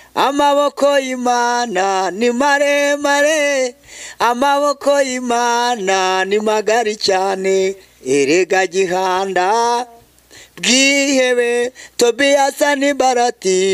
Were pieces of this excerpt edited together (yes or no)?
no